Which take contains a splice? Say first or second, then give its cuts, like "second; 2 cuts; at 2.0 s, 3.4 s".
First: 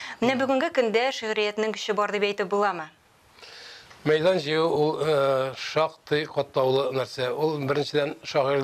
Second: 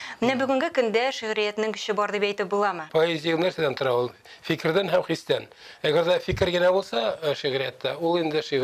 second; 1 cut; at 2.8 s